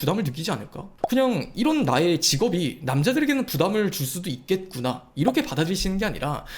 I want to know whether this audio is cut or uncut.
cut